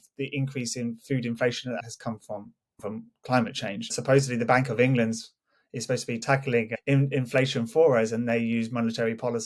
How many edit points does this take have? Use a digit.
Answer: 3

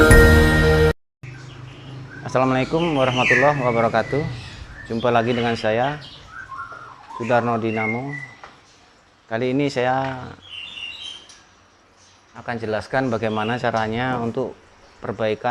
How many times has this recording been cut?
1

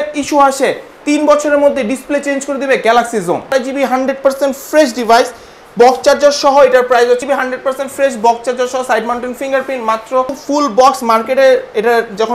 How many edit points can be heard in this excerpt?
3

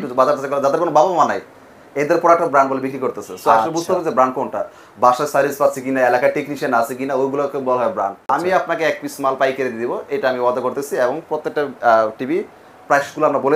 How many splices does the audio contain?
1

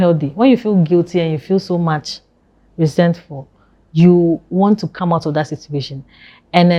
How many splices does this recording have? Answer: 0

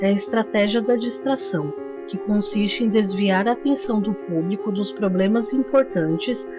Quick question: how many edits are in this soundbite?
1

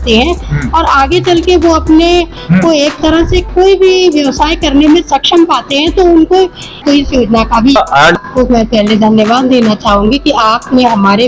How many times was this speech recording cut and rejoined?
1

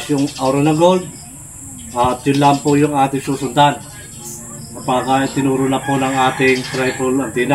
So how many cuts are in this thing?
0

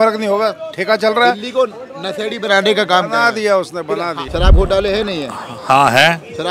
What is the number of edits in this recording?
1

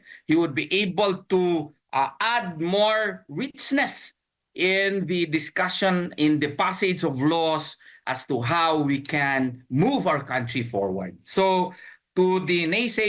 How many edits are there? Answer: 0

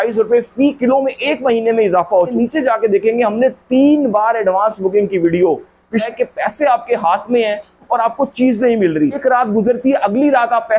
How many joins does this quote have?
3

